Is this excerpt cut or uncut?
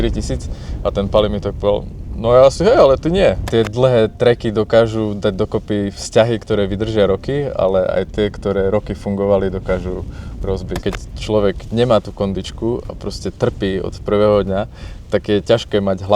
cut